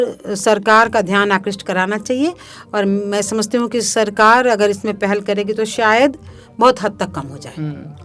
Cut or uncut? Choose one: uncut